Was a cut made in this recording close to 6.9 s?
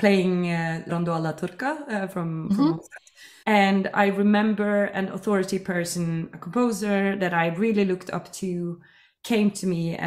no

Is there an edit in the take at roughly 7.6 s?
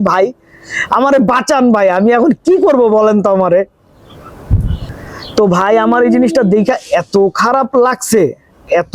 no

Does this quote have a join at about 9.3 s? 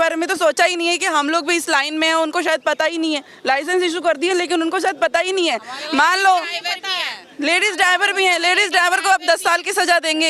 no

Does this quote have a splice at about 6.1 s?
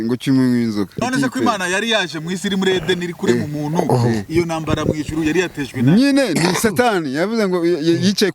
no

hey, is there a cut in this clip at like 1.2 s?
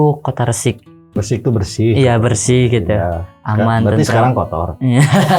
yes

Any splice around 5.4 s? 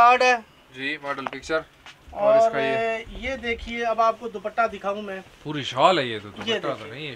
no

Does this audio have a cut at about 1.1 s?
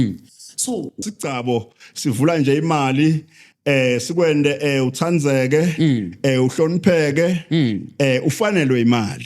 yes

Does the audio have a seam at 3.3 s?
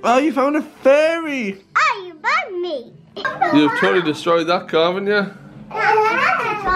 yes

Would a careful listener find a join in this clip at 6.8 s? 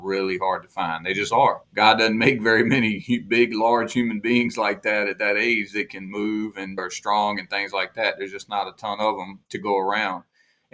yes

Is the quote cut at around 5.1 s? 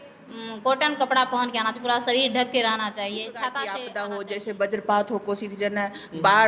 no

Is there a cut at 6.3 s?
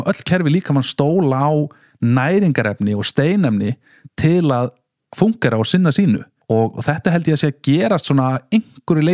yes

